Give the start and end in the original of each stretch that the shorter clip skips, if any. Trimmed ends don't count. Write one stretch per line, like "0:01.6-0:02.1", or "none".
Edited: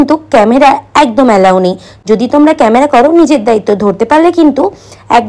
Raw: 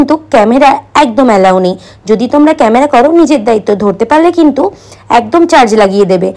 none